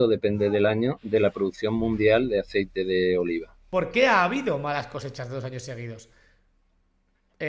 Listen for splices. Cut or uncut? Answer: cut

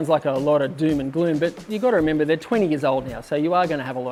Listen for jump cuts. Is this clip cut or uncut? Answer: uncut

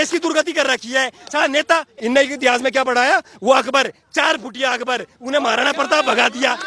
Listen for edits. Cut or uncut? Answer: cut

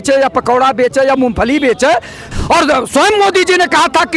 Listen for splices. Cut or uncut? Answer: cut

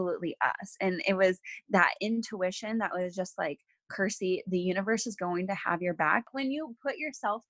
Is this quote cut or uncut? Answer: cut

